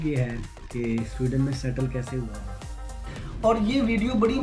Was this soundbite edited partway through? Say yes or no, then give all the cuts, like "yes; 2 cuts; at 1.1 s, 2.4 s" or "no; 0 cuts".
no; 0 cuts